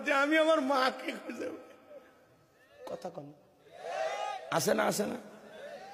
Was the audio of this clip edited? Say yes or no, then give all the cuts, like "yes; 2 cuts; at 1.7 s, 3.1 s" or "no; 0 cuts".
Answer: no; 0 cuts